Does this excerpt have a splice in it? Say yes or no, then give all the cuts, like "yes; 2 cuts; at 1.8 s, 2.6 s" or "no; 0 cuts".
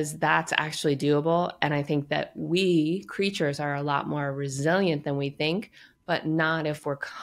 no; 0 cuts